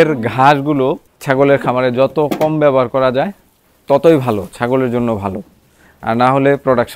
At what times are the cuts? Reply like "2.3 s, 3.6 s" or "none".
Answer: 1.1 s